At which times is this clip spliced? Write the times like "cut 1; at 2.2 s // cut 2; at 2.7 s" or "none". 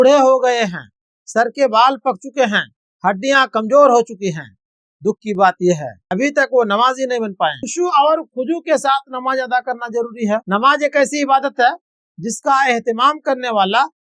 cut 1; at 6.0 s // cut 2; at 7.6 s